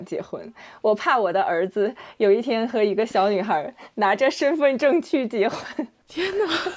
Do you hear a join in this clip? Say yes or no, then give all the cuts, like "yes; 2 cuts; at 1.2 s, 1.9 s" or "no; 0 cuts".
no; 0 cuts